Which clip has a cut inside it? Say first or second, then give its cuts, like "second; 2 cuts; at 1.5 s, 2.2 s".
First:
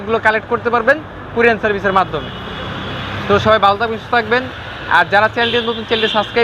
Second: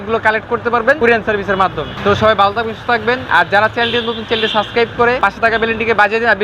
second; 4 cuts; at 1.0 s, 1.9 s, 3.2 s, 5.2 s